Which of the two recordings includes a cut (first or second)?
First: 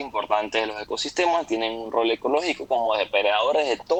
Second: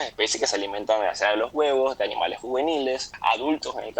second